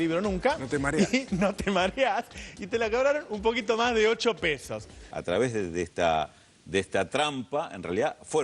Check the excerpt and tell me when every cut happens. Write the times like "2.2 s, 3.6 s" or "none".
5.1 s